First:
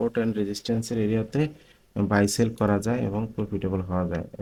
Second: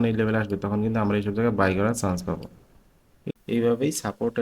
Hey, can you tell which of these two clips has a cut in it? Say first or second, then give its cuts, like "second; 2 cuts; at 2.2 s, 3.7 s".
second; 1 cut; at 3.1 s